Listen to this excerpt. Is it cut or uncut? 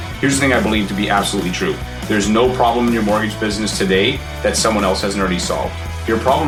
uncut